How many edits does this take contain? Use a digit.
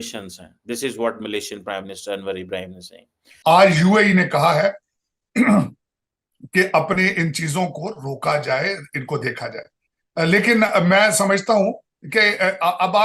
1